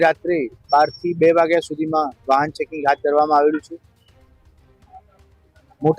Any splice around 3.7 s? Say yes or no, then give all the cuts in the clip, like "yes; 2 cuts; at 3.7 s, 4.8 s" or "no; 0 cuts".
no; 0 cuts